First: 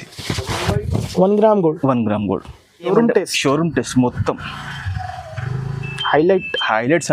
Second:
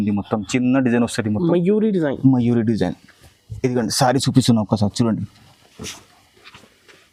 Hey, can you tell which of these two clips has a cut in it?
first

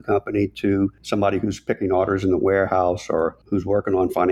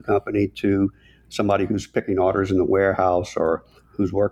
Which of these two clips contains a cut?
first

